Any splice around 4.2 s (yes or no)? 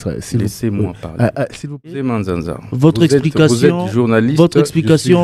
no